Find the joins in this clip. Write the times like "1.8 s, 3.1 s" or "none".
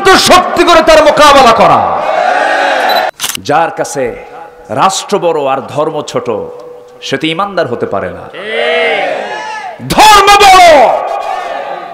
3.1 s